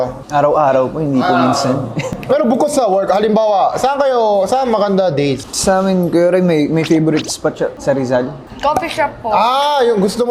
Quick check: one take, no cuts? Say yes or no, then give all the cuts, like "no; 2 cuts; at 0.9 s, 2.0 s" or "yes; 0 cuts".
yes; 0 cuts